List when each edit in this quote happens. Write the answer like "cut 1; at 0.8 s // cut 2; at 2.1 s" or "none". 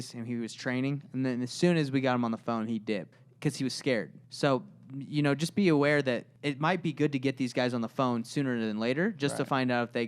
cut 1; at 3.2 s // cut 2; at 4.2 s // cut 3; at 6.3 s